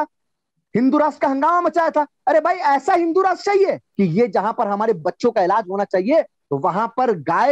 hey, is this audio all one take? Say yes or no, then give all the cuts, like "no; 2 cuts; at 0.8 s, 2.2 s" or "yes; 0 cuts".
no; 1 cut; at 3.9 s